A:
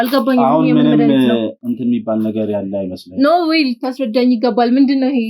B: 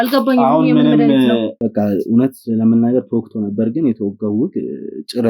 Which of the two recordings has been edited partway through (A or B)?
B